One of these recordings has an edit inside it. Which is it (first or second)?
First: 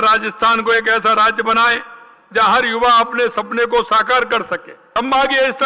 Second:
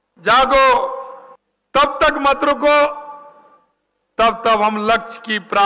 first